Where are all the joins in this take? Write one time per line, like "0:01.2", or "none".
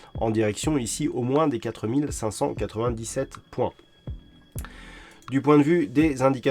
0:03.9
0:05.1